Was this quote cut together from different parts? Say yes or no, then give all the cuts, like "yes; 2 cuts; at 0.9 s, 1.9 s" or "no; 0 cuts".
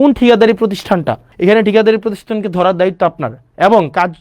yes; 1 cut; at 1.3 s